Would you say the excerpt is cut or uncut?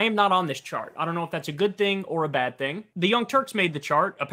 cut